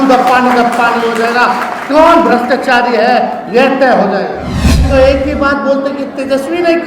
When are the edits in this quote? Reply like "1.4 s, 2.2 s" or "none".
4.9 s